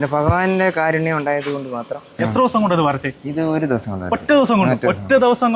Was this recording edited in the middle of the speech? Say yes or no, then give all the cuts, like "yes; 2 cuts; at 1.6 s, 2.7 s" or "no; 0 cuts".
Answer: yes; 1 cut; at 2.2 s